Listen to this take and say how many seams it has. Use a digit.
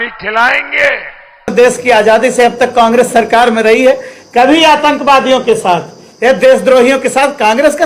1